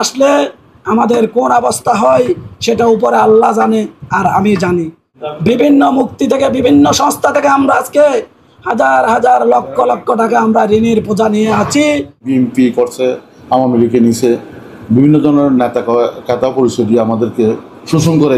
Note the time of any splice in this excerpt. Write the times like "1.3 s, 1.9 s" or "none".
5.1 s, 12.3 s